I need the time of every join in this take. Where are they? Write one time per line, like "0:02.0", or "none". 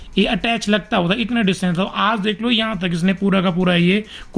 none